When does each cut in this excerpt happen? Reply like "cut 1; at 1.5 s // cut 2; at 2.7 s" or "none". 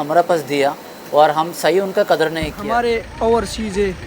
cut 1; at 2.6 s